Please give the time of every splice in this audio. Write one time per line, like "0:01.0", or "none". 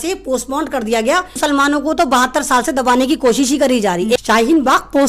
0:01.4
0:04.2